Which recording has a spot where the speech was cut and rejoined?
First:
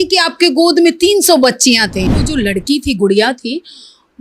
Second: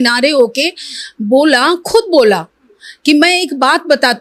first; 1 cut; at 2.2 s

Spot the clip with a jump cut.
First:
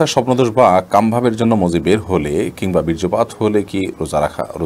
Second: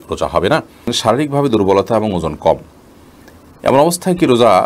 second; 1 cut; at 0.9 s

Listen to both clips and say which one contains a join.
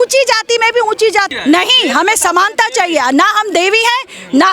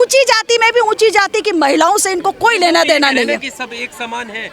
first; 1 cut; at 1.3 s

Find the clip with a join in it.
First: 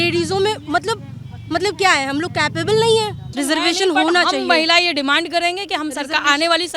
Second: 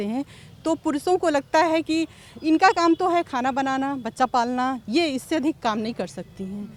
first; 1 cut; at 3.2 s

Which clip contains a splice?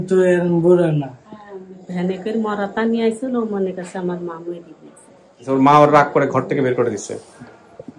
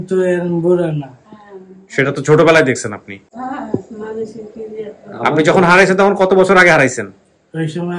first; 2 cuts; at 1.8 s, 5.4 s

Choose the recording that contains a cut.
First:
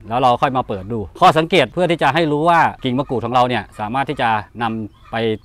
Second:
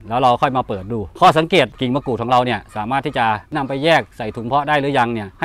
second; 2 cuts; at 1.7 s, 3.5 s

